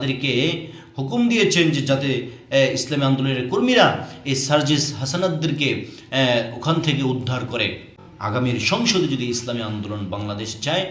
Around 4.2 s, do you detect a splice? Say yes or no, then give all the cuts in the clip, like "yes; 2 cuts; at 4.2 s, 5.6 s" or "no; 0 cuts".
no; 1 cut; at 8.0 s